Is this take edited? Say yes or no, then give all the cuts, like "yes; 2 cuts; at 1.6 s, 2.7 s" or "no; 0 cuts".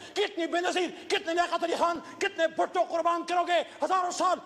no; 0 cuts